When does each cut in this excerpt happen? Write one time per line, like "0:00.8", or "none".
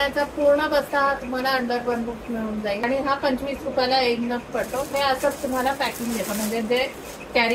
0:02.8